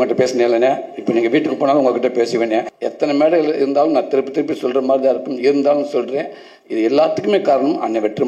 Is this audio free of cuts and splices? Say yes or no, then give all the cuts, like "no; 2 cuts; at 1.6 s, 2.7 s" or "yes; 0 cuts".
no; 1 cut; at 2.7 s